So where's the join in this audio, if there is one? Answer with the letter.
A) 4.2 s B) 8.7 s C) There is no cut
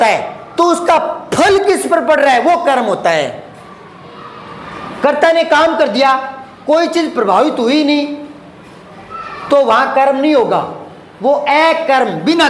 C